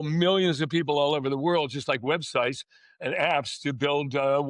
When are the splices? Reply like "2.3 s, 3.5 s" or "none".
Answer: none